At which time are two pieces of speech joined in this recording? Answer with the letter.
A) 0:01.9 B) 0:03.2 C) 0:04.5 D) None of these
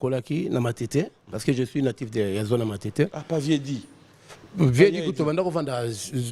D